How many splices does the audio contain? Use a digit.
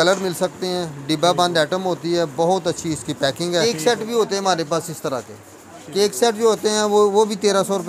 1